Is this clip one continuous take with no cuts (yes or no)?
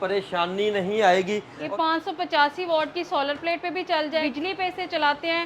no